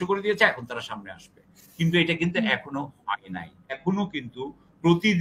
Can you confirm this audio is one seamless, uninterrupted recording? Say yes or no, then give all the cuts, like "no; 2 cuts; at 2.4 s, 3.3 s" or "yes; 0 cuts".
no; 1 cut; at 3.8 s